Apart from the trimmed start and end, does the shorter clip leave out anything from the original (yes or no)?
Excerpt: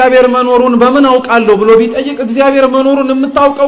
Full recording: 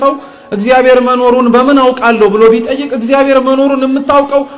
no